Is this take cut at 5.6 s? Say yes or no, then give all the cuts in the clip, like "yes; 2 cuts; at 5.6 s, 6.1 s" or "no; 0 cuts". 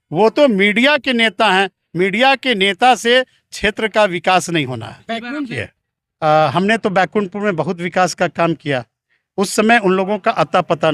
yes; 1 cut; at 5.6 s